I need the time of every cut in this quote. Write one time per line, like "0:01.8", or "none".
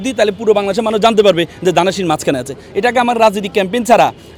none